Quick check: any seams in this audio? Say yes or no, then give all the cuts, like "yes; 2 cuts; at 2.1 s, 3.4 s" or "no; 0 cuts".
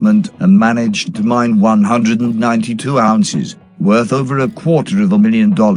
no; 0 cuts